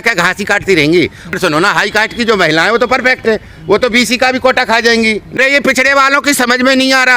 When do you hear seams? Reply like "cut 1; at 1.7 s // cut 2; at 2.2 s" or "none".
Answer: cut 1; at 1.3 s // cut 2; at 5.4 s